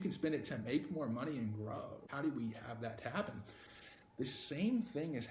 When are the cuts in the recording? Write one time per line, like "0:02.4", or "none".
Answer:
0:02.0